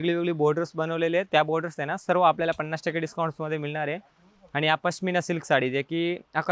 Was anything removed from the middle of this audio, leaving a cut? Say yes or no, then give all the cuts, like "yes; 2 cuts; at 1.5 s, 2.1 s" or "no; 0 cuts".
no; 0 cuts